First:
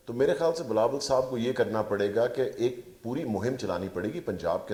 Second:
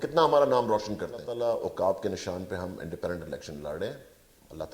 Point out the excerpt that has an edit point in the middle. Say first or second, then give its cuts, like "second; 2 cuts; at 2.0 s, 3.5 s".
second; 1 cut; at 1.3 s